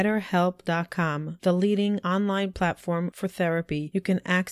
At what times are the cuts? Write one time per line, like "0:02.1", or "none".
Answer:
none